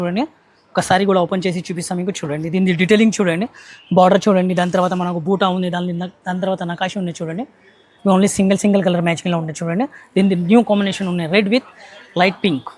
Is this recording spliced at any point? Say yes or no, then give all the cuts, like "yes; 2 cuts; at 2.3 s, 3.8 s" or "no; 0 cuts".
yes; 1 cut; at 7.9 s